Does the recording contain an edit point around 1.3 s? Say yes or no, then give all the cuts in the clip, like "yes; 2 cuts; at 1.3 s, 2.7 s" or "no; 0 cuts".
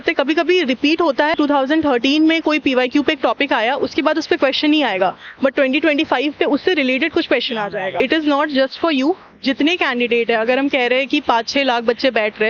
yes; 2 cuts; at 1.3 s, 8.0 s